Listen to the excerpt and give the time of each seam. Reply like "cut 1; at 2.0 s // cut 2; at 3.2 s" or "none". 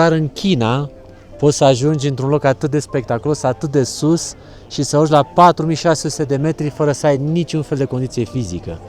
none